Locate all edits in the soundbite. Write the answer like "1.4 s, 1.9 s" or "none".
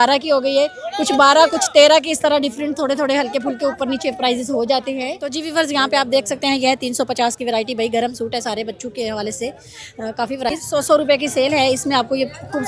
5.3 s, 10.5 s